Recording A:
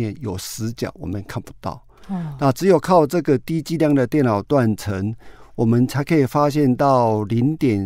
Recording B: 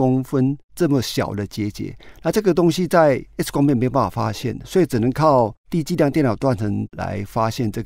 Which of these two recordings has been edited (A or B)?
B